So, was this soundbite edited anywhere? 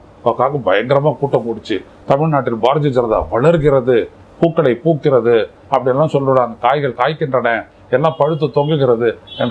no; 0 cuts

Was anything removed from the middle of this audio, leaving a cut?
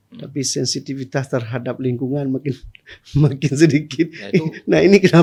no; 0 cuts

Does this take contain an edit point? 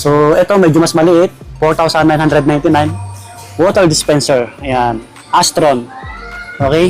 no; 0 cuts

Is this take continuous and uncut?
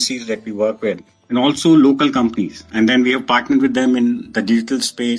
no; 1 cut; at 2.6 s

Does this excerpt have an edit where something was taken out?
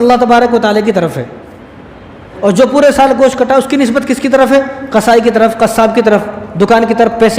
yes; 1 cut; at 2.3 s

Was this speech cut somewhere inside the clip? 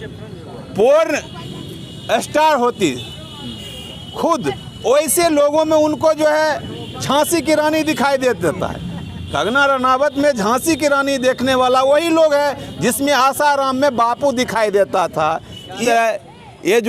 yes; 1 cut; at 15.8 s

